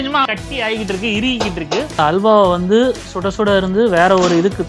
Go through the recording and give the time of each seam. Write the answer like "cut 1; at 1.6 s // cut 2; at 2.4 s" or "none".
cut 1; at 1.9 s